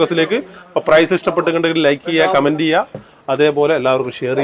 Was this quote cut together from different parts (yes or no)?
no